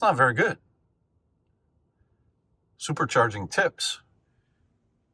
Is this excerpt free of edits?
yes; 0 cuts

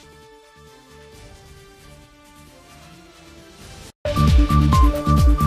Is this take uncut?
no; 1 cut; at 3.3 s

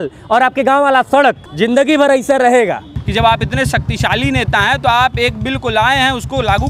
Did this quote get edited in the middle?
yes; 2 cuts; at 1.5 s, 3.0 s

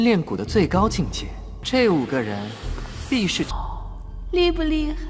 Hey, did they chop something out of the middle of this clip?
yes; 1 cut; at 3.5 s

